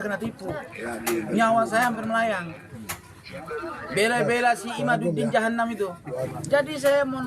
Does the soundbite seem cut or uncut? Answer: cut